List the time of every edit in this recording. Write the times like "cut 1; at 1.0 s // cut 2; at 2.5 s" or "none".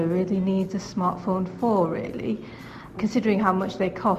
cut 1; at 2.9 s